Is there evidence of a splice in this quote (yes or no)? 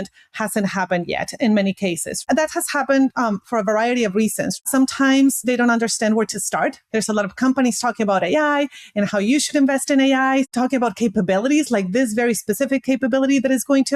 yes